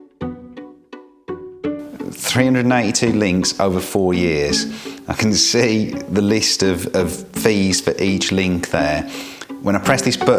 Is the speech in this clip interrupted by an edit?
yes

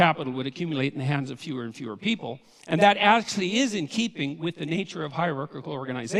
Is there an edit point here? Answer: no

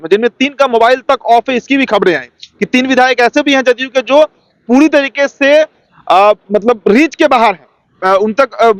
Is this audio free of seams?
yes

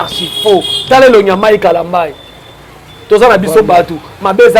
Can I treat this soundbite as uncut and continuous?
yes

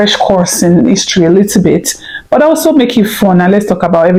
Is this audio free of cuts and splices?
yes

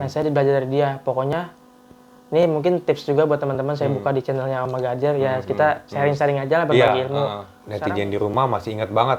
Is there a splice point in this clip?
yes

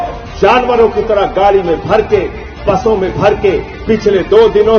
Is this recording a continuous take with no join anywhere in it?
yes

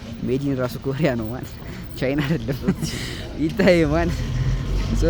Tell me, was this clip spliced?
no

